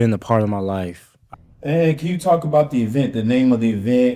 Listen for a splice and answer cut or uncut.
cut